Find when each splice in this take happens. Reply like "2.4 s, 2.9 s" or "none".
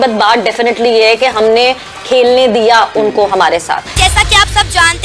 3.9 s